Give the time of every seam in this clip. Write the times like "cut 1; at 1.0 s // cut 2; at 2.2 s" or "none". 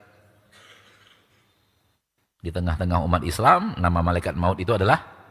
none